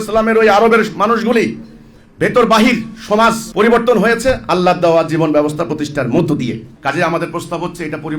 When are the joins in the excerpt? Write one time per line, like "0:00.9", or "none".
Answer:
0:06.7